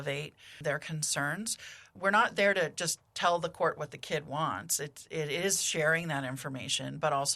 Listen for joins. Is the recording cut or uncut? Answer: uncut